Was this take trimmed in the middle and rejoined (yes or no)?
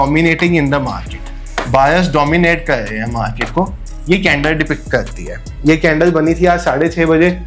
no